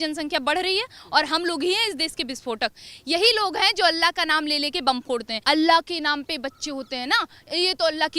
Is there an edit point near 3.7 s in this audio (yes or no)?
no